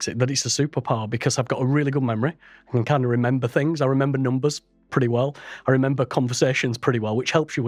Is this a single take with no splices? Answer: yes; 0 cuts

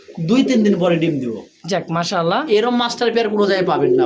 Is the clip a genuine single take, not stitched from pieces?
yes; 0 cuts

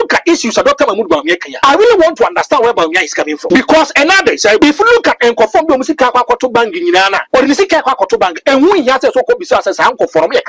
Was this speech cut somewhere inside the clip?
yes; 4 cuts; at 1.5 s, 3.4 s, 4.6 s, 7.2 s

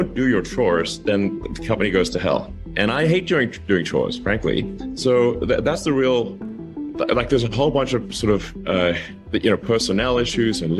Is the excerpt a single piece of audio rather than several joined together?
yes; 0 cuts

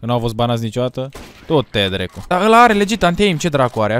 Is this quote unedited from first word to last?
no; 1 cut; at 2.3 s

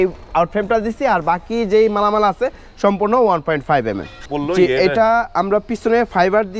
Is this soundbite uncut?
no; 1 cut; at 4.2 s

